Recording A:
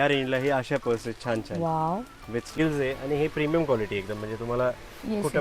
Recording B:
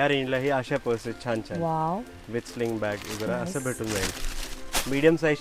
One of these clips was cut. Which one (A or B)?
A